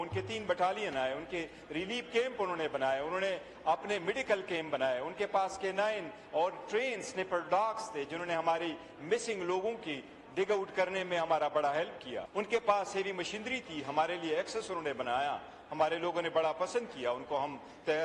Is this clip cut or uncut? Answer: cut